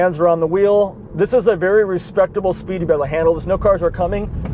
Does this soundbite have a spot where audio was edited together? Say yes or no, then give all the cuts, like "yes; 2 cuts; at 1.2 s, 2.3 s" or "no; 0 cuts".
no; 0 cuts